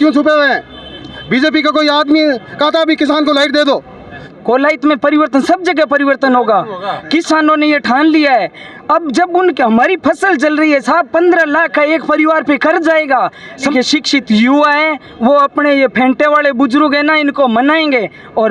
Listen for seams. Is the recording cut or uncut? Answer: cut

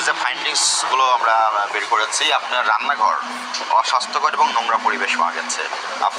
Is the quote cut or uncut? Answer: uncut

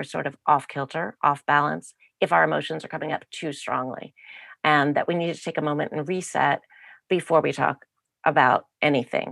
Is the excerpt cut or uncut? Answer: uncut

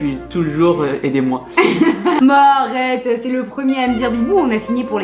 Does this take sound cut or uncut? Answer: cut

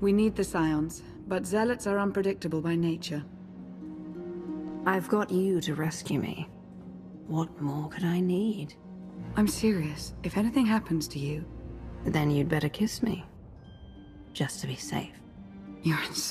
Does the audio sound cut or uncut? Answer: uncut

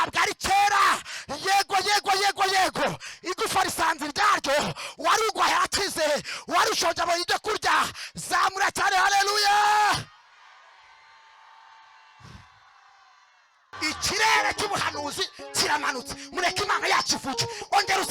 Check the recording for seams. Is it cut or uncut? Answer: cut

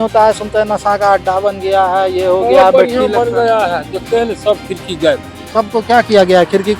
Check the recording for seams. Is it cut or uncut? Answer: cut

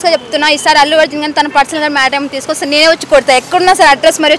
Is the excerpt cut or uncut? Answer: uncut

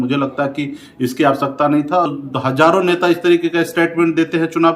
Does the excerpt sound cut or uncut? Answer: cut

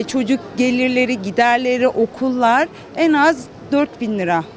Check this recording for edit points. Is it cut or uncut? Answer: uncut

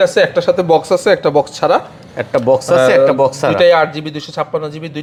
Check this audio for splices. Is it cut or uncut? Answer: uncut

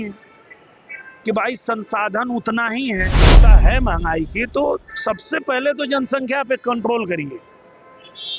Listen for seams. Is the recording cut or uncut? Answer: cut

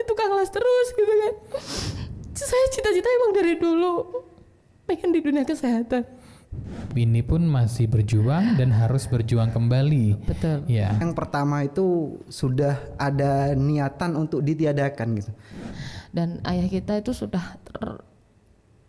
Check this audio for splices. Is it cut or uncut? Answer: cut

